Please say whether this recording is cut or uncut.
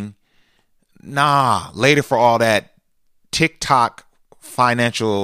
uncut